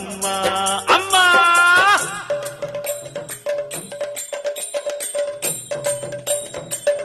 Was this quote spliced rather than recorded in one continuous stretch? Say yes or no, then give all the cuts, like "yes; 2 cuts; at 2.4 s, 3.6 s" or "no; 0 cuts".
yes; 1 cut; at 4.4 s